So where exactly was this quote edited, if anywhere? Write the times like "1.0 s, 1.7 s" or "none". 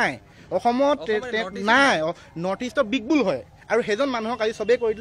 none